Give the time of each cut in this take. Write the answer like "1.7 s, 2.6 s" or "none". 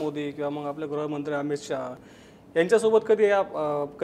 2.0 s